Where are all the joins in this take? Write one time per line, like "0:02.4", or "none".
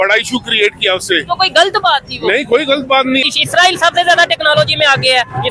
0:03.2